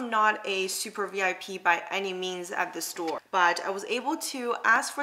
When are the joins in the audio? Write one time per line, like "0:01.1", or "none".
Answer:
0:03.2